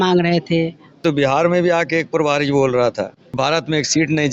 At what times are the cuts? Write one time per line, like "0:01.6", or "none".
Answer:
0:00.9
0:03.3